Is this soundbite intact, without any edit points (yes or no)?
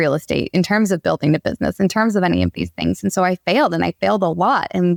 yes